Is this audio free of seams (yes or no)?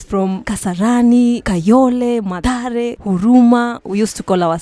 no